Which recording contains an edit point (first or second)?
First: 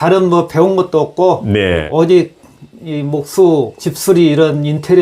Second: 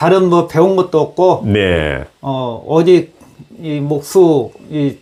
first